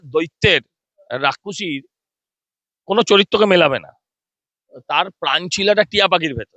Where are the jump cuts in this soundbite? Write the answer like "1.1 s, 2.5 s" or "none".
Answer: none